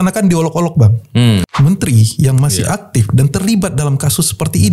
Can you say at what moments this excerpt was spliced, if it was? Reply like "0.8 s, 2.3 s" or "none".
1.5 s